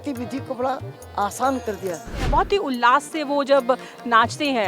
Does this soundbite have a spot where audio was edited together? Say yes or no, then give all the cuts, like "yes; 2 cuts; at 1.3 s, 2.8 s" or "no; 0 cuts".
yes; 1 cut; at 2.2 s